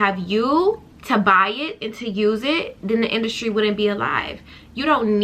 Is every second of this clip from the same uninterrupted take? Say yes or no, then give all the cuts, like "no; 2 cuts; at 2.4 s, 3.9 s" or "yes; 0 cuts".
no; 1 cut; at 0.9 s